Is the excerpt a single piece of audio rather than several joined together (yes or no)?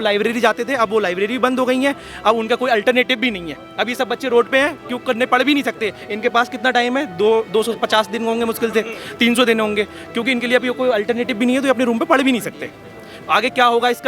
yes